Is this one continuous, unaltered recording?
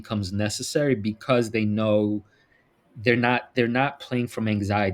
yes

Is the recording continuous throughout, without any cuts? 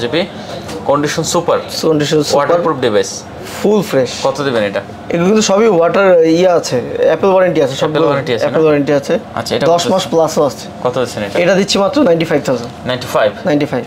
yes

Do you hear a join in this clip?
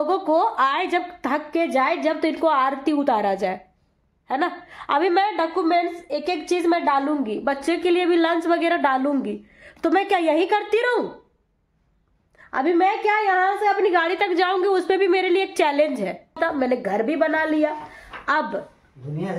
yes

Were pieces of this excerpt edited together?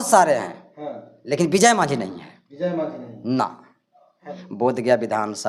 yes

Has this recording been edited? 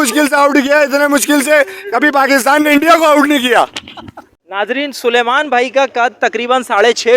yes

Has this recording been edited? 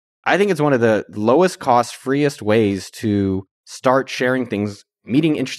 no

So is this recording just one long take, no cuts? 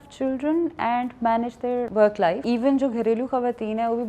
no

